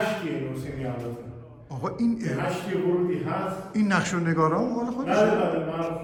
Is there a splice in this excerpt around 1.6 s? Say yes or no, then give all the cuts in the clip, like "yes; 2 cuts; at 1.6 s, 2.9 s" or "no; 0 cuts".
no; 0 cuts